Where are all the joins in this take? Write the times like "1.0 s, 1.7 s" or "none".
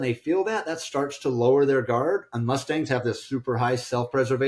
none

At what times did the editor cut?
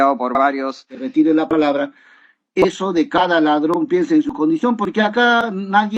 0.9 s

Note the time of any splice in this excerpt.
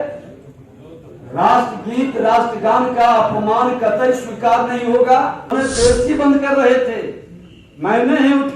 5.5 s

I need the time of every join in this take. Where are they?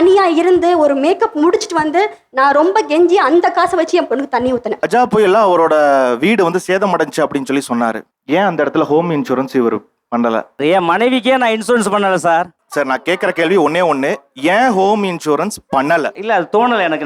4.8 s

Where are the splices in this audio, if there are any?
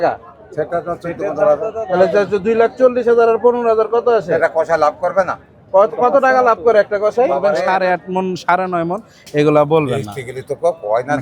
7.6 s

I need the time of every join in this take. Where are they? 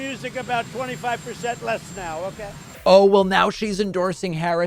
2.7 s

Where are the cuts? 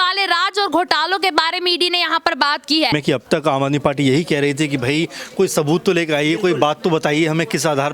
2.9 s

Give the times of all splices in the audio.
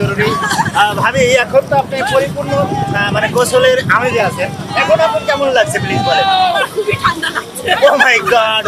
none

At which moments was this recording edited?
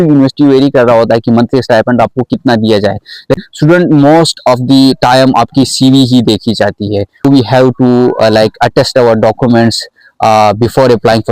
3.4 s, 7.2 s

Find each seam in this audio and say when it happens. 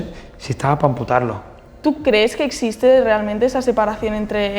1.8 s

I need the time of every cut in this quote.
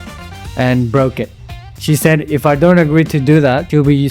1.8 s

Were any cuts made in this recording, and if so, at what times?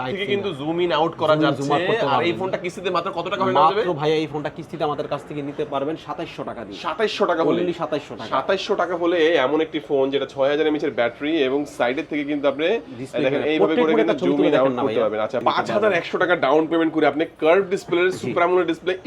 15.4 s

